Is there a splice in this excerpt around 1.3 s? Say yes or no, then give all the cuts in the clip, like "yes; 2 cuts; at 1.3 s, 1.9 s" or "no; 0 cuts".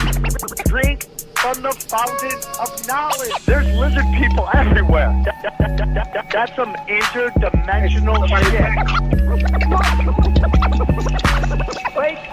no; 1 cut; at 3.9 s